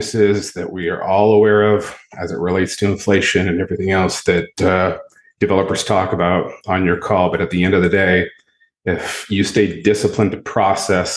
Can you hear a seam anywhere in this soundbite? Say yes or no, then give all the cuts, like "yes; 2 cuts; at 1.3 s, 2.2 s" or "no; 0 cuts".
no; 0 cuts